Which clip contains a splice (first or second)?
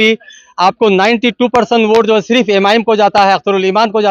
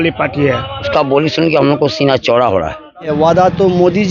second